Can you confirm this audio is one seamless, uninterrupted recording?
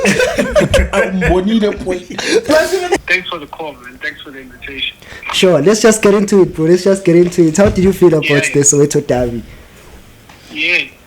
no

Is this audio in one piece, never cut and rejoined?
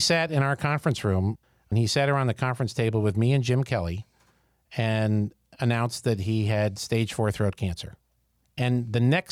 no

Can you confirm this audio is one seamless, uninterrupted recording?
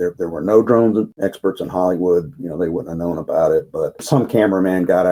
yes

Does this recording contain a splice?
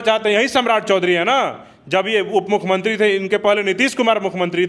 no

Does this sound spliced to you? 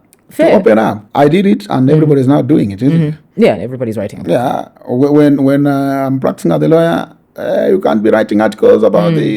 yes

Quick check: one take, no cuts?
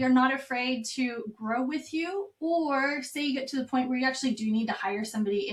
yes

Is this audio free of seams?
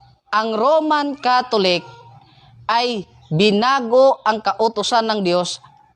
yes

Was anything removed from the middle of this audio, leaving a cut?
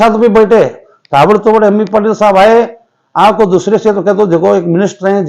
no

